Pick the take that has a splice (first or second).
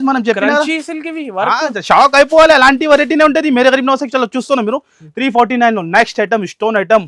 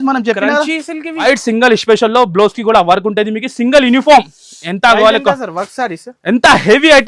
second